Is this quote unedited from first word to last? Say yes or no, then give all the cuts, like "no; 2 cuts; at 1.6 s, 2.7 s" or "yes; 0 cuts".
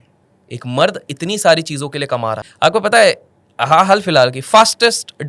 no; 1 cut; at 2.5 s